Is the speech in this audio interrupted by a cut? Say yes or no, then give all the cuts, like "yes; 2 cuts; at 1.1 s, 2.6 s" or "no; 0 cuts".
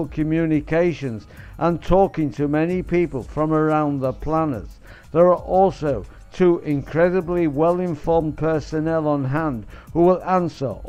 no; 0 cuts